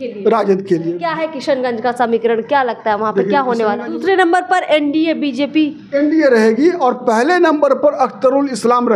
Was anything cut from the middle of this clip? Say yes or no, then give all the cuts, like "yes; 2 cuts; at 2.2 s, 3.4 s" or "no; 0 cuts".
yes; 2 cuts; at 1.0 s, 3.9 s